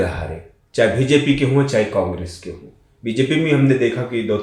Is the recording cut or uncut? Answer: uncut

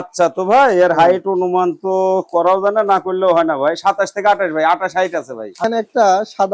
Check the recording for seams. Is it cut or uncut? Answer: cut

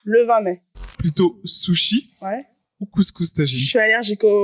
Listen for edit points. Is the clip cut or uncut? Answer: cut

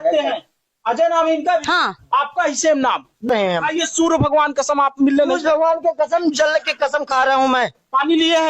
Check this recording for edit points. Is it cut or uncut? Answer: cut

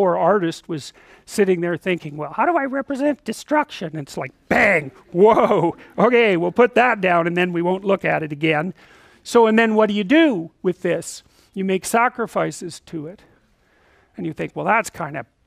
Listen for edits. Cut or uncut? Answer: cut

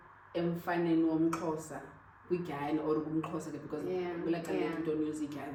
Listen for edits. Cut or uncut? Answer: uncut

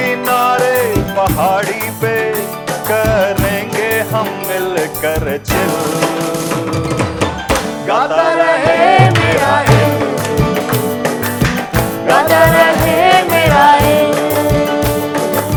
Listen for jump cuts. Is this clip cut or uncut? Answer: uncut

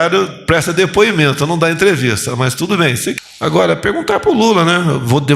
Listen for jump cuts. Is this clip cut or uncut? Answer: cut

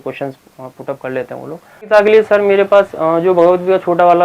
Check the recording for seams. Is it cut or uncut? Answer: cut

